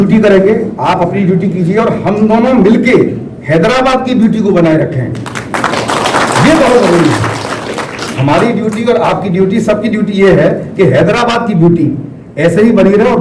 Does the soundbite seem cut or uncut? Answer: uncut